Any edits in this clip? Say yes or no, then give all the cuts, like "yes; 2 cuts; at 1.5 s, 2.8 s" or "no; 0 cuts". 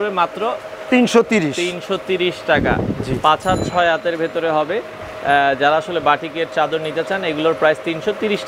no; 0 cuts